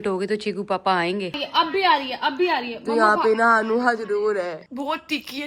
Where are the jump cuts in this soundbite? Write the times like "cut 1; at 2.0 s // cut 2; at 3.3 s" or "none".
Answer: cut 1; at 1.3 s // cut 2; at 4.6 s